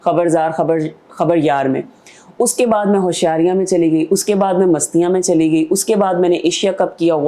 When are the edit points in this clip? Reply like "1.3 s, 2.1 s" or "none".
none